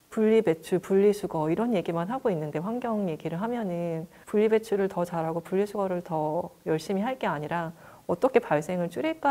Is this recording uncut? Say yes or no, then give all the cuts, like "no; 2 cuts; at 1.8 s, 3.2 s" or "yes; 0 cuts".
no; 1 cut; at 4.1 s